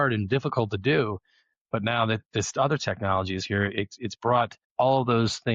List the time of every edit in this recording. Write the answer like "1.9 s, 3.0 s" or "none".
4.6 s

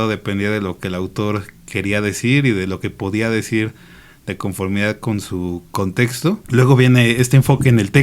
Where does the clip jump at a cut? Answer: 6.4 s

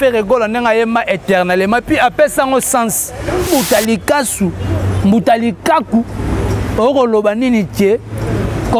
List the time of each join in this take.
3.5 s

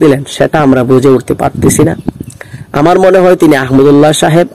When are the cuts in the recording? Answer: none

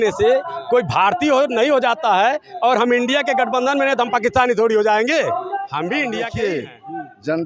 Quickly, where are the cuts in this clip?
6.3 s

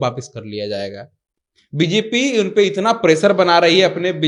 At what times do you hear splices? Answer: none

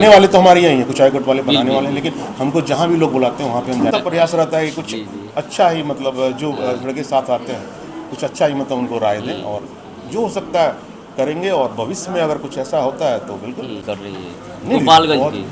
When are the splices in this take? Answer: 3.9 s, 13.9 s

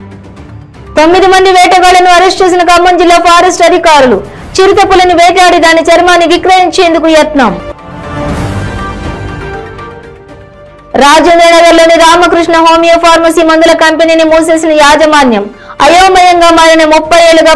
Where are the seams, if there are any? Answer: 0.9 s

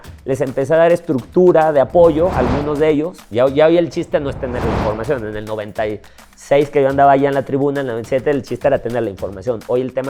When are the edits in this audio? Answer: 3.2 s

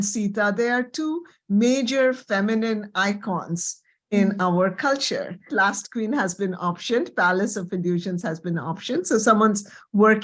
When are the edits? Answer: 5.5 s

